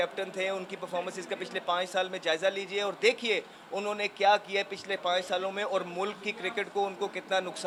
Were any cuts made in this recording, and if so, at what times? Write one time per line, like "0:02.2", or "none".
none